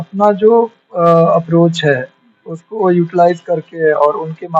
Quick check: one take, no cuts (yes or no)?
yes